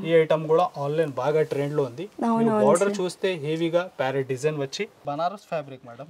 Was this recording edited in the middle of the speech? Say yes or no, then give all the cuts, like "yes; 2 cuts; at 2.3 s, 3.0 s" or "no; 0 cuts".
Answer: yes; 1 cut; at 5.0 s